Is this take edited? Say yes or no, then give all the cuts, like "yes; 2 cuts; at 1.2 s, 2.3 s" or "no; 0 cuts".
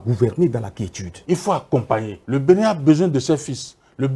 yes; 2 cuts; at 1.1 s, 2.2 s